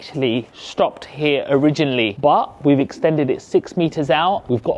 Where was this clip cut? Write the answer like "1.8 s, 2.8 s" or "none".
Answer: none